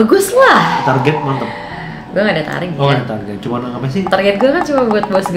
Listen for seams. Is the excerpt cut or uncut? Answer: uncut